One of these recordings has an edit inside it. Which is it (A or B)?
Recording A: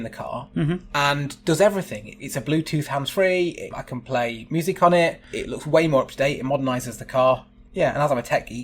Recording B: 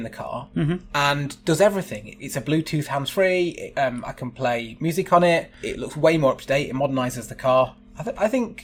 A